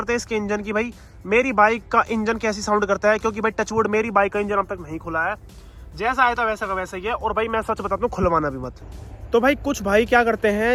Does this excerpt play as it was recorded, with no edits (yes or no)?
yes